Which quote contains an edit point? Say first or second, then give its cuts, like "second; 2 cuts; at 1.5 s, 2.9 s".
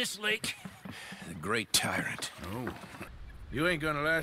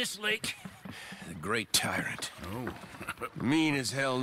first; 1 cut; at 3.1 s